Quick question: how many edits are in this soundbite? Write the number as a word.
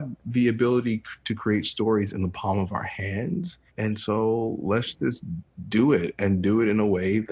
one